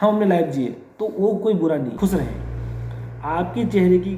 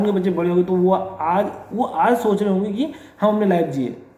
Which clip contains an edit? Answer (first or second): first